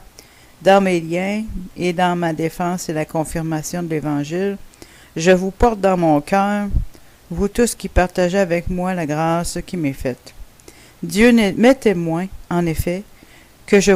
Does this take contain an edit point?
no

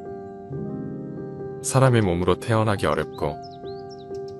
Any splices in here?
no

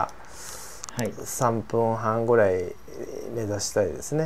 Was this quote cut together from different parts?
no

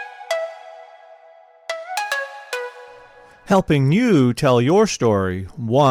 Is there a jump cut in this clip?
no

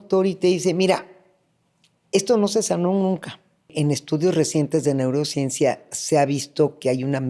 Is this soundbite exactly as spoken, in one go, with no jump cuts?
no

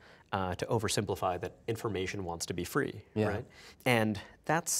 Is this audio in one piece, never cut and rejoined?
no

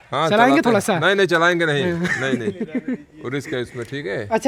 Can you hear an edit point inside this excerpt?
no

